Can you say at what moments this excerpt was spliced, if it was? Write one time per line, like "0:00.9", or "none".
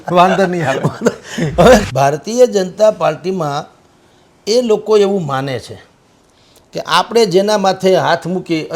0:01.8